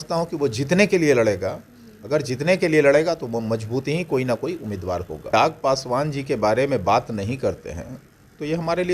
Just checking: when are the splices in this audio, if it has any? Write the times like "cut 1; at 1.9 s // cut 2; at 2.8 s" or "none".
cut 1; at 5.3 s